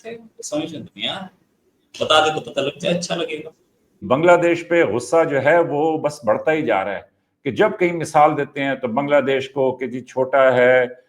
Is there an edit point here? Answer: yes; 1 cut; at 4.0 s

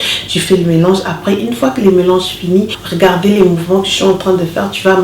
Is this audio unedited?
no; 1 cut; at 2.8 s

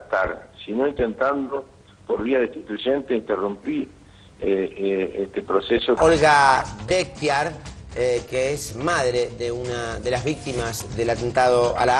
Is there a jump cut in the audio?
yes; 1 cut; at 6.0 s

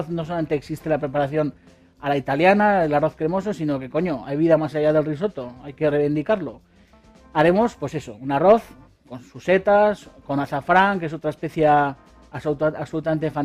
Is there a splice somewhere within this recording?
no; 0 cuts

